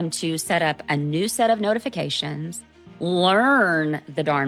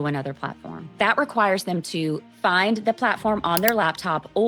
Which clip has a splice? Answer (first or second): second